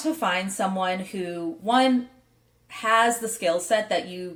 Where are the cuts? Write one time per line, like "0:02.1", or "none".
none